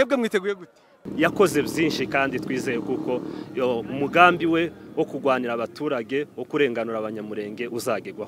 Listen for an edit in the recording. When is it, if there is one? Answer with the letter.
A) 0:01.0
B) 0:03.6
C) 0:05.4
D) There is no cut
A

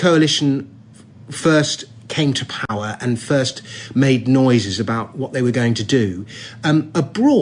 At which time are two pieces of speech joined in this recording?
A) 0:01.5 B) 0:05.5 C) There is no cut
B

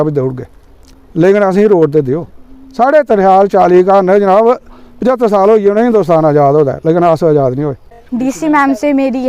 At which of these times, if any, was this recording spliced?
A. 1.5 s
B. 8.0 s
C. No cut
B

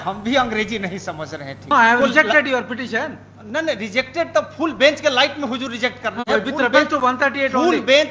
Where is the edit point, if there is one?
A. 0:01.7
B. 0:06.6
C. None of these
A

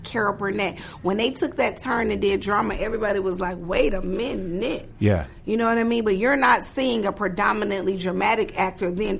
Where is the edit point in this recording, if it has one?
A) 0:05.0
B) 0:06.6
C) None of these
C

